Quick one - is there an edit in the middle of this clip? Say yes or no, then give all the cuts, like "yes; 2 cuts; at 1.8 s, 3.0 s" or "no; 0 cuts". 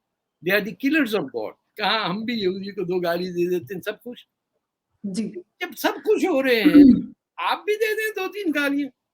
yes; 1 cut; at 1.6 s